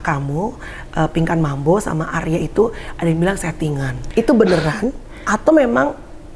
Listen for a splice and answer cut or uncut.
cut